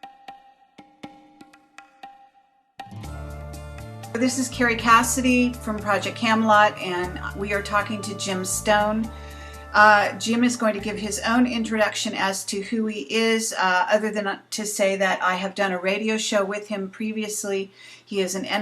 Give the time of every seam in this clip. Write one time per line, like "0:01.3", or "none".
0:00.9

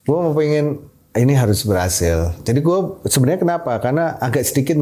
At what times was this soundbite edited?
none

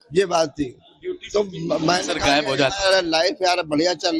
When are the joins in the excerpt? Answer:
none

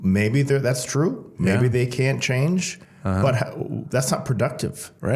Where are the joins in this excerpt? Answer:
none

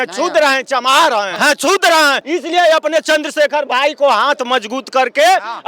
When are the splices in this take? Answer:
0:01.3
0:02.2

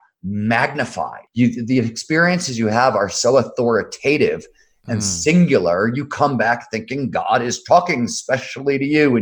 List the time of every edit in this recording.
0:01.2

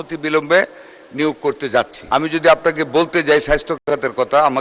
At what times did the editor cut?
0:02.0

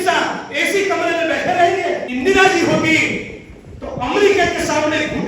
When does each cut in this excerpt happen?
0:02.1

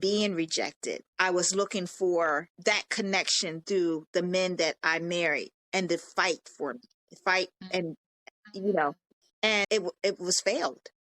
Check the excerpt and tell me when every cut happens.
0:01.1
0:02.5

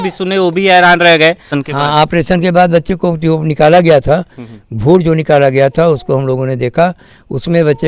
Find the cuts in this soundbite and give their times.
0:01.6

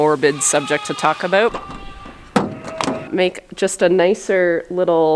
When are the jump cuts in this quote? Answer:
0:01.5
0:03.1

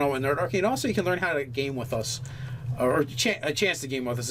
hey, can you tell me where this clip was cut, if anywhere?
none

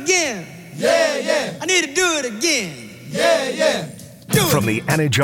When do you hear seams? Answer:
none

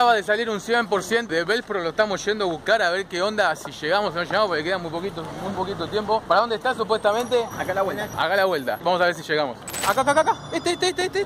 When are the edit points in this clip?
0:01.3
0:06.2
0:09.8

